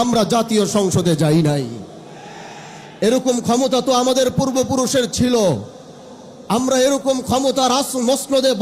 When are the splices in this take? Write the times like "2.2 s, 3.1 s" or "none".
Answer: none